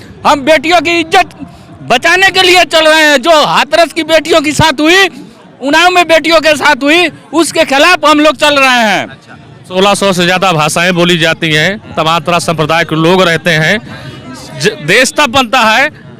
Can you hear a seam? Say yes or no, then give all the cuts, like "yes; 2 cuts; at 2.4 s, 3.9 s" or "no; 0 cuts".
yes; 1 cut; at 9.7 s